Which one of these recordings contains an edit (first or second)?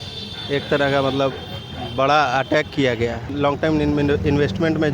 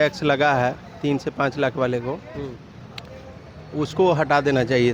first